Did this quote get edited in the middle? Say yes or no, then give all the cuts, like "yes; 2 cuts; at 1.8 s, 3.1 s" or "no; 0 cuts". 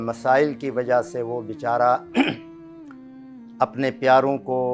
no; 0 cuts